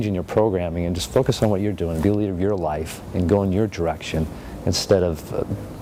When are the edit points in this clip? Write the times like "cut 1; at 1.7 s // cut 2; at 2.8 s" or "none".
none